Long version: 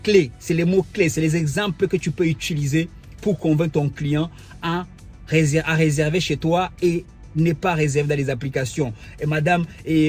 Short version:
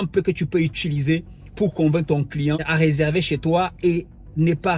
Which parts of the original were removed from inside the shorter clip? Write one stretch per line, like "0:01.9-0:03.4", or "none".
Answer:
0:04.3-0:05.7